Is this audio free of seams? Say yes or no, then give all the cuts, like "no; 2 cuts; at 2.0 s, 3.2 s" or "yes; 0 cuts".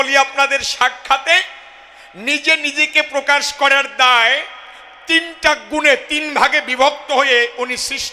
yes; 0 cuts